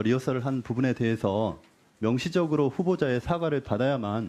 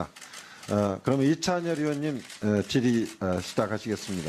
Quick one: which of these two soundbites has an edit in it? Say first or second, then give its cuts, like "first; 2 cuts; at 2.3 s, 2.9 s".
second; 1 cut; at 2.3 s